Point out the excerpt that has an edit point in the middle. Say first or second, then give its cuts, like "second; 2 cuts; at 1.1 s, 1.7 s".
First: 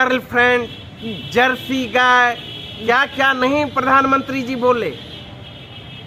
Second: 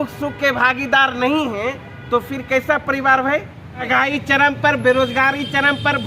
second; 1 cut; at 3.9 s